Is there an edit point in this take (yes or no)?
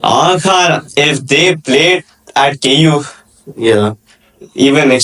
no